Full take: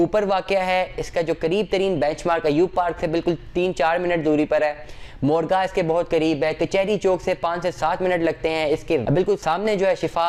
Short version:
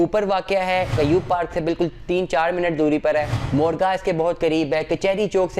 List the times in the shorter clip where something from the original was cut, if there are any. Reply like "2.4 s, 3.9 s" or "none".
0.9 s, 3.4 s